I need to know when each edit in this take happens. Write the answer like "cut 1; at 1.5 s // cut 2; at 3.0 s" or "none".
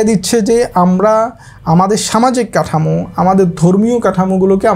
none